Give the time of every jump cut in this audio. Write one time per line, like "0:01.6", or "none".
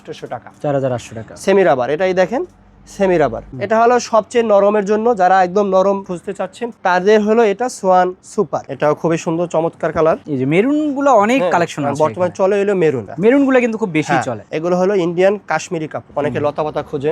0:03.5
0:08.6
0:13.1
0:16.1